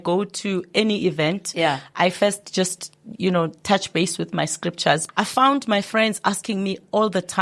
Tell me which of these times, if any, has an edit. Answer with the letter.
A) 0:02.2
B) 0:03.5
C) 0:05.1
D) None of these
C